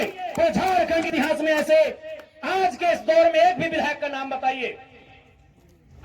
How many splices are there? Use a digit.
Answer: 1